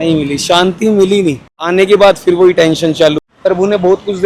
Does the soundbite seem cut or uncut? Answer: cut